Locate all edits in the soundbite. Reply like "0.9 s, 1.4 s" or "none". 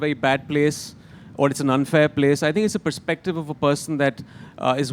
none